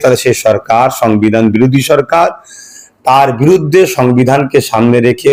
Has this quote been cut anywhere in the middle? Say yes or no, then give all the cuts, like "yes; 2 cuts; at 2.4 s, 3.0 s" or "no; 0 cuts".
no; 0 cuts